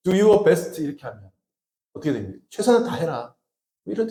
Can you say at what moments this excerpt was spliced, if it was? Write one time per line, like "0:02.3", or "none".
none

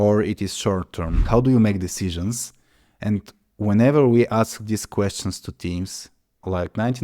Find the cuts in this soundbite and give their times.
0:01.2

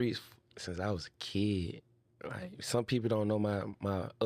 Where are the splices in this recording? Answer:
none

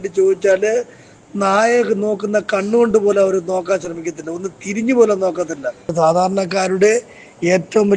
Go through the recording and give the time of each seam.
0:05.9

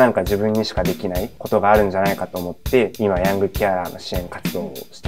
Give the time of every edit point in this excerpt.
0:01.3
0:02.9

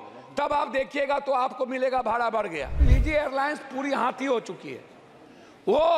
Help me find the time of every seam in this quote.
0:02.9

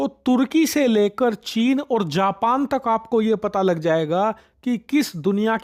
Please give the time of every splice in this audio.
none

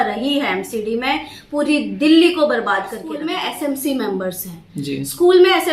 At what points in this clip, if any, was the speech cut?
0:03.1

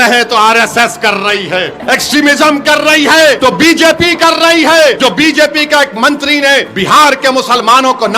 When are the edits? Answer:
0:01.8
0:03.4
0:05.0
0:06.7

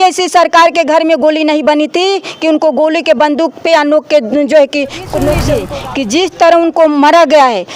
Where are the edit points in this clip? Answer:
0:05.5

